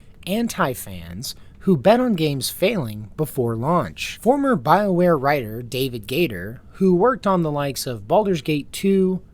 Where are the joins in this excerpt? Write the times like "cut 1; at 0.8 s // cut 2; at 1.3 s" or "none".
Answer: none